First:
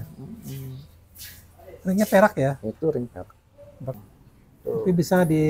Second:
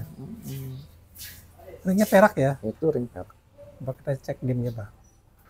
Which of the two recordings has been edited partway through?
first; 1 cut; at 3.9 s

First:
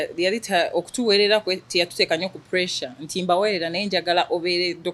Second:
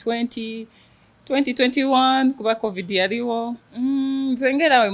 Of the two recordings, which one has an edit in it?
second; 1 cut; at 3.6 s

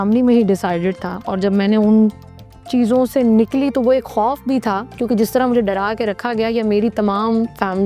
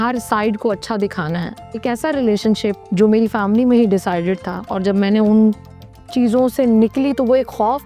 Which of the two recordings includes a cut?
second; 1 cut; at 1.8 s

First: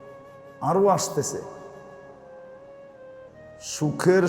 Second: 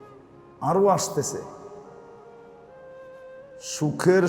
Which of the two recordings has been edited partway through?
first; 2 cuts; at 1.7 s, 3.0 s

